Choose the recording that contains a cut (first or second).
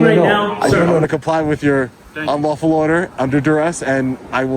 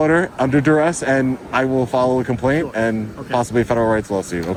first